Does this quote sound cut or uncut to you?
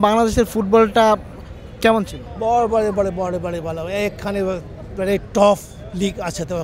uncut